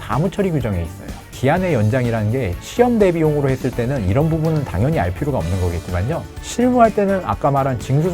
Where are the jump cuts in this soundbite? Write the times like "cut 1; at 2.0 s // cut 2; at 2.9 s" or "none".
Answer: cut 1; at 1.3 s